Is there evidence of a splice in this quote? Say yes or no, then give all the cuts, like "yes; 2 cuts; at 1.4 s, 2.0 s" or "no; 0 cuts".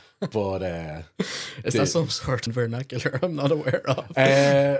yes; 1 cut; at 2.4 s